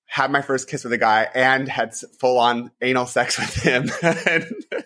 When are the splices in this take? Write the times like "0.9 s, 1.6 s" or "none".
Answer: none